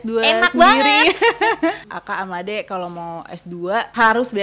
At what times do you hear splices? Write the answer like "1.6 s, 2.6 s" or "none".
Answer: 1.9 s